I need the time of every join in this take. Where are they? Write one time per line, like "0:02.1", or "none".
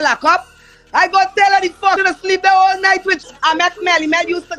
0:02.0
0:03.2